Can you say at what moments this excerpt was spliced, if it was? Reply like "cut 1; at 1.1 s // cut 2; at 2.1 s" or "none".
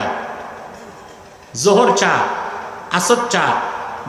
none